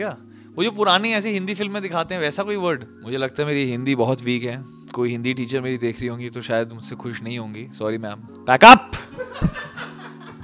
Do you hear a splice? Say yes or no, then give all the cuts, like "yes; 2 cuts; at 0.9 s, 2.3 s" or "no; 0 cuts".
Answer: yes; 2 cuts; at 2.9 s, 8.3 s